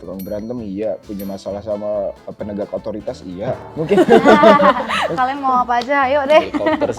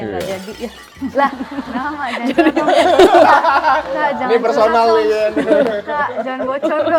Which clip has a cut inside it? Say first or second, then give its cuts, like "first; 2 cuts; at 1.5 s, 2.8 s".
first; 2 cuts; at 3.7 s, 5.1 s